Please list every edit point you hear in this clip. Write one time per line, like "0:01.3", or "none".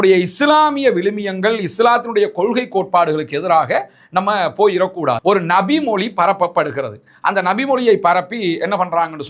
0:05.2